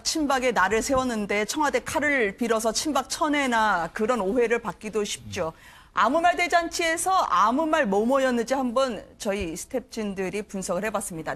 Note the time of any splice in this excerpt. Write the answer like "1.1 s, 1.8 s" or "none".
none